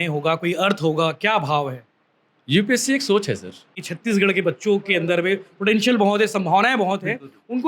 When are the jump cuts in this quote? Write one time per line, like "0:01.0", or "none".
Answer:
0:03.9